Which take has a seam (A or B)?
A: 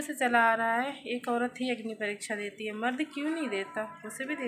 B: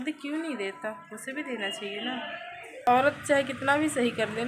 B